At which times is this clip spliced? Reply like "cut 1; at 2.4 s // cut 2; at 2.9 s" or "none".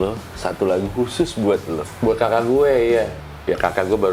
cut 1; at 1.9 s // cut 2; at 3.2 s